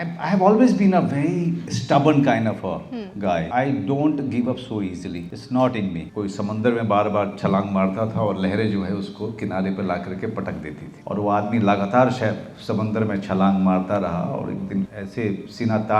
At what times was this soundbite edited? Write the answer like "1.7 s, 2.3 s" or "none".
1.7 s, 3.5 s, 5.3 s, 6.1 s, 10.9 s, 15.0 s

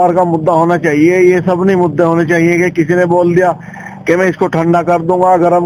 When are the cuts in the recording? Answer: none

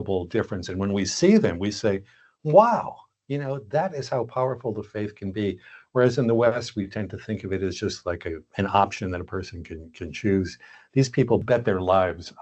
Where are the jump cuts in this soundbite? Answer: 11.4 s

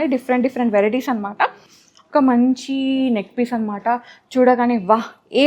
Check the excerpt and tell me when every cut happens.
1.7 s

